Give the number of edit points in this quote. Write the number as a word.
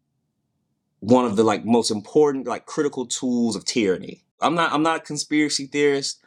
one